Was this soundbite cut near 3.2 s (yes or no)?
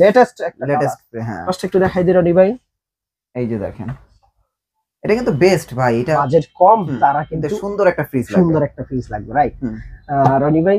no